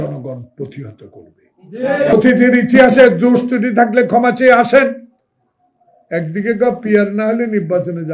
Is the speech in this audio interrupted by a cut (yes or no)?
yes